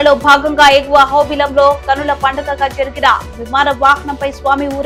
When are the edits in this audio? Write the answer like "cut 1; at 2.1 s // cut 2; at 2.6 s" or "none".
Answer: none